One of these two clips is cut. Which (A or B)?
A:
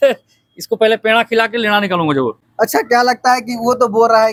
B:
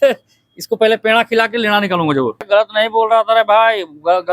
B